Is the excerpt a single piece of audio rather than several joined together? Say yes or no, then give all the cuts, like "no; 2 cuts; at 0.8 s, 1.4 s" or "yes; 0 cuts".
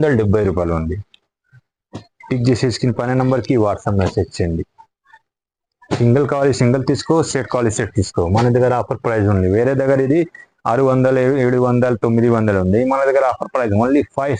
yes; 0 cuts